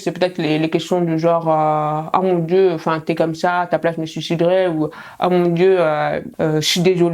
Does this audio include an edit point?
no; 0 cuts

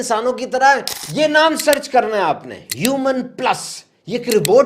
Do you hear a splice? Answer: yes; 1 cut; at 1.0 s

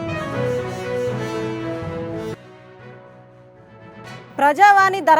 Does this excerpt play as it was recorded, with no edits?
no; 1 cut; at 2.3 s

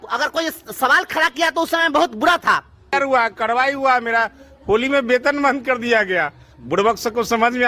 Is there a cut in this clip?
yes; 1 cut; at 2.9 s

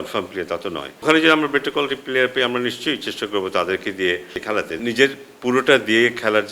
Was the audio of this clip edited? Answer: yes; 2 cuts; at 1.0 s, 4.7 s

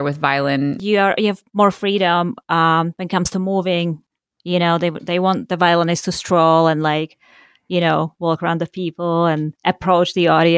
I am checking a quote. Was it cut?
yes; 2 cuts; at 0.7 s, 4.1 s

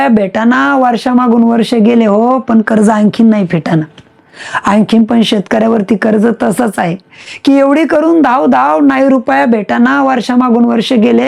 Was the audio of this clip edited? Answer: no; 0 cuts

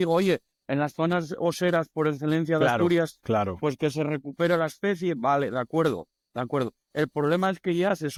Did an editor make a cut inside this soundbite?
no; 0 cuts

